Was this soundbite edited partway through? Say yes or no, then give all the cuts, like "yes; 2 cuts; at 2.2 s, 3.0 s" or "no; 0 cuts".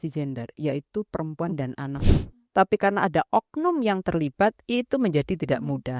yes; 1 cut; at 2.0 s